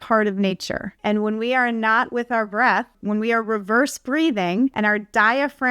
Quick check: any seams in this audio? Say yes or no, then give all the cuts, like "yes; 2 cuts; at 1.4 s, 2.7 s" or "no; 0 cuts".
yes; 3 cuts; at 0.9 s, 3.0 s, 4.7 s